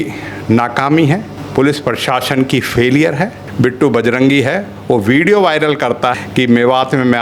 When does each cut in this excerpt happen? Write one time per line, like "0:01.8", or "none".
0:01.4
0:03.4
0:06.1